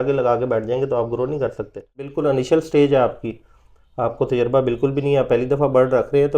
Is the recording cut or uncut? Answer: cut